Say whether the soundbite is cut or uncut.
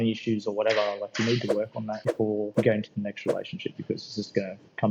cut